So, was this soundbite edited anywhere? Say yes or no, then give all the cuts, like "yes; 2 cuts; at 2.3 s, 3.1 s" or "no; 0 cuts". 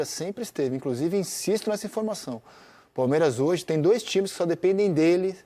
no; 0 cuts